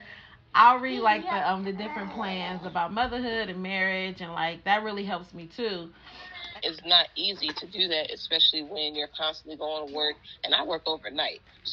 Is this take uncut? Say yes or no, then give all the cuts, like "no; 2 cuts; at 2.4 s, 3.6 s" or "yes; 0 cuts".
no; 1 cut; at 6.4 s